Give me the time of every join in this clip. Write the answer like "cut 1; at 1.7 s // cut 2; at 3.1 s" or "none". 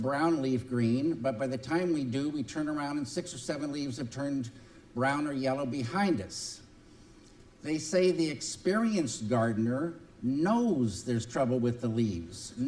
cut 1; at 1.6 s